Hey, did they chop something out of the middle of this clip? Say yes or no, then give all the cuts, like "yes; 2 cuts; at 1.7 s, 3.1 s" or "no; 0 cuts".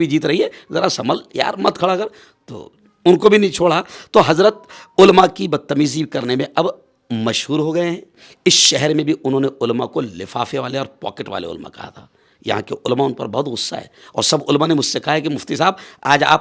no; 0 cuts